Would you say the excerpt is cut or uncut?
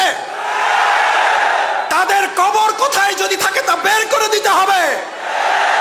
uncut